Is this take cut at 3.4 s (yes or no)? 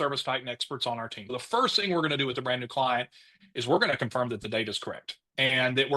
no